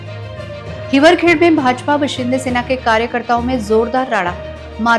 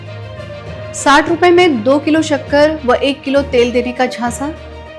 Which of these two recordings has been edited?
second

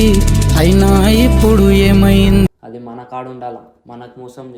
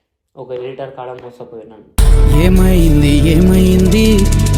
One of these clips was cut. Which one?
first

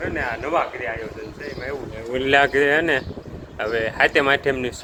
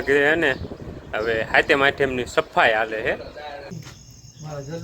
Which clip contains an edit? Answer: second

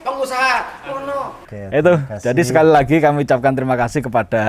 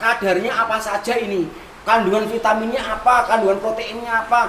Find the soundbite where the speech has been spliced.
first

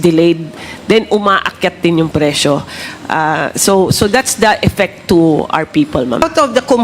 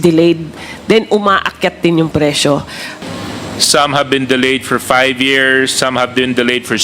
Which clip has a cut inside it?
second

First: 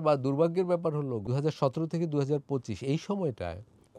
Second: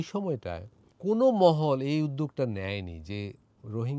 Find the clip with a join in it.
first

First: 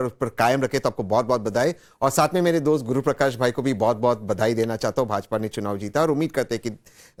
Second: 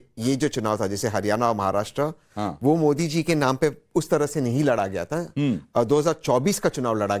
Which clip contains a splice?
second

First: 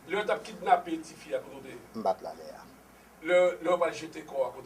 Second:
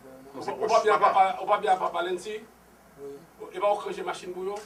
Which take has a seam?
first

